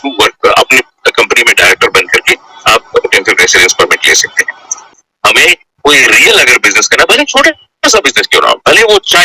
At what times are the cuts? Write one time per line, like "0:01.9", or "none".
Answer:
0:04.9